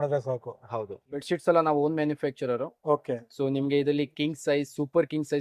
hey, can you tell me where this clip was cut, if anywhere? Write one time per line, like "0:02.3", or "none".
0:01.0